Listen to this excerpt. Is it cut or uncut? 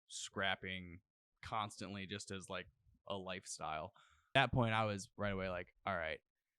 cut